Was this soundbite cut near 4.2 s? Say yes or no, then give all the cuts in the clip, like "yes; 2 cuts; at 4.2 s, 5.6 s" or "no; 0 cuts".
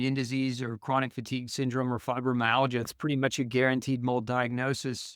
no; 1 cut; at 2.9 s